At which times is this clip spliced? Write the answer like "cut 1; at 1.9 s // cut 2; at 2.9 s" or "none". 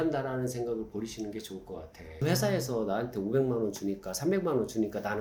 none